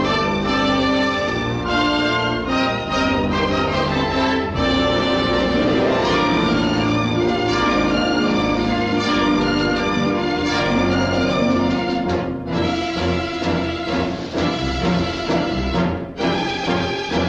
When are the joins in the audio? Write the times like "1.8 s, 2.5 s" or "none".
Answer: none